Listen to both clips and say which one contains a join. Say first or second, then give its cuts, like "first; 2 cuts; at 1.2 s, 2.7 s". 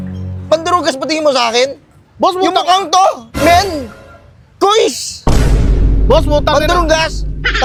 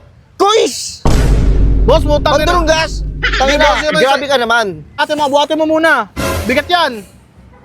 second; 1 cut; at 5.0 s